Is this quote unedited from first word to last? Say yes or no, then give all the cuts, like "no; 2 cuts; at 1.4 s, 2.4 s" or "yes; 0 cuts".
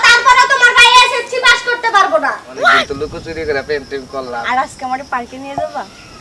no; 1 cut; at 2.5 s